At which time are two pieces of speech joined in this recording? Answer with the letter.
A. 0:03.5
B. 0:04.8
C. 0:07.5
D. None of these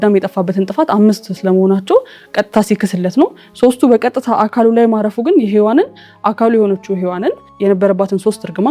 C